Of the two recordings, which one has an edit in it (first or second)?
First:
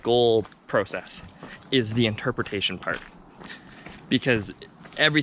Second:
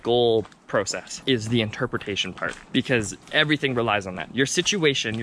second